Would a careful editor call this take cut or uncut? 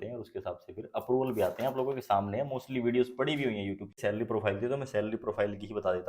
cut